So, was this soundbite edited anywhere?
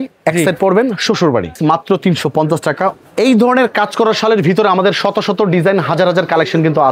yes; 2 cuts; at 1.6 s, 3.0 s

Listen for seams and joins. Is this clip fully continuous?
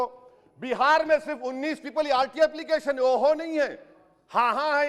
yes; 0 cuts

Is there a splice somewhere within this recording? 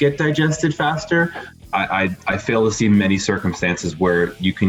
no; 0 cuts

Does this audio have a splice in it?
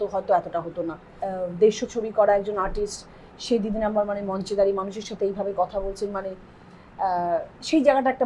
yes; 1 cut; at 1.1 s

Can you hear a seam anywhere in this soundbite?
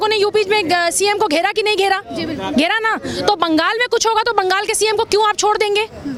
no; 0 cuts

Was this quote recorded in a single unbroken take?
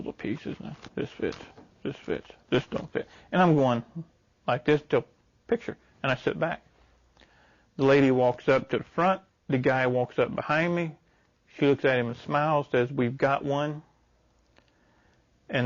yes; 0 cuts

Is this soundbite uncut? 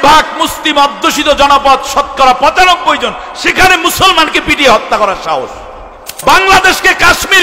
no; 1 cut; at 6.1 s

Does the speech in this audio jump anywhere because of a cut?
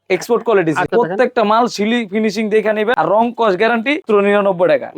yes; 3 cuts; at 0.9 s, 2.9 s, 4.0 s

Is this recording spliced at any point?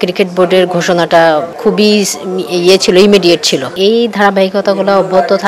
yes; 2 cuts; at 1.5 s, 3.7 s

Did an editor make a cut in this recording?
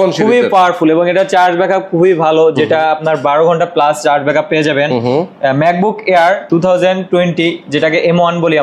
no; 0 cuts

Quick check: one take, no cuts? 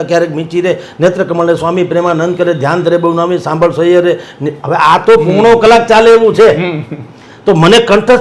yes; 0 cuts

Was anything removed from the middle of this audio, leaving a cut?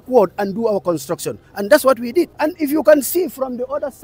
yes; 1 cut; at 2.3 s

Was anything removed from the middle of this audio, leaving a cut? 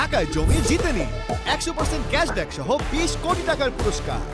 no; 0 cuts

